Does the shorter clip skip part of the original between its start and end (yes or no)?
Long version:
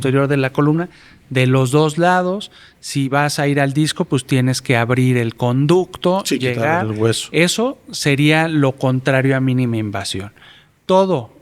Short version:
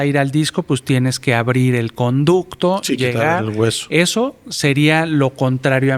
no